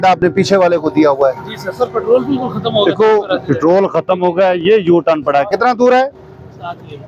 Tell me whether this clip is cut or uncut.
uncut